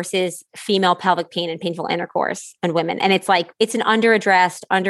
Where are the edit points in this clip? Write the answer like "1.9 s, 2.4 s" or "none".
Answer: 3.5 s